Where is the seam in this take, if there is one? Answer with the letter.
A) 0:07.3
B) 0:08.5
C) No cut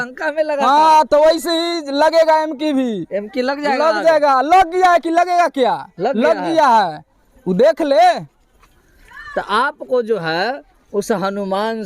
C